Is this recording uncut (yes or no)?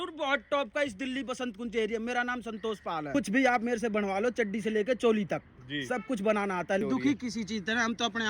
no